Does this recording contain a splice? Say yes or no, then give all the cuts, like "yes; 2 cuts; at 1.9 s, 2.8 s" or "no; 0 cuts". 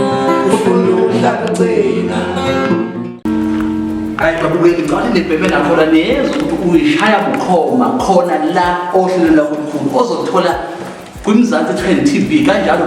yes; 1 cut; at 3.3 s